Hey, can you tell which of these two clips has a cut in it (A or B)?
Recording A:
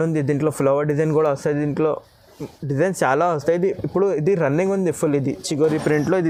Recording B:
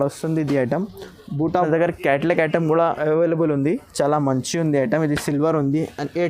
B